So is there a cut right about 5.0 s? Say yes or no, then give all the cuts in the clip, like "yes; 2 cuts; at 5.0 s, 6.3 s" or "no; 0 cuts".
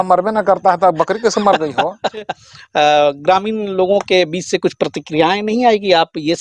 no; 1 cut; at 2.4 s